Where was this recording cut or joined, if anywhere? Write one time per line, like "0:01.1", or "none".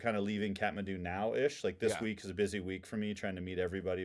none